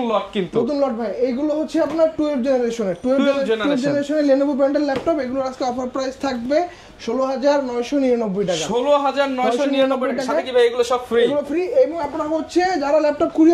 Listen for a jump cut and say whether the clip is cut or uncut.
uncut